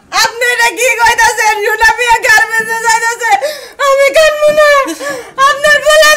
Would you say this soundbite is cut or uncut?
uncut